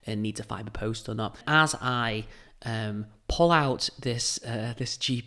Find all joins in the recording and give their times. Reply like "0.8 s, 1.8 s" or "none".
1.4 s